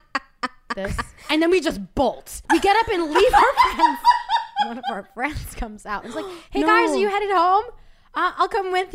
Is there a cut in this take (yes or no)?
yes